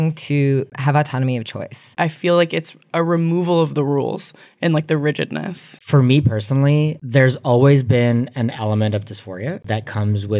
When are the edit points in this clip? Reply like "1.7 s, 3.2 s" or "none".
1.9 s, 5.8 s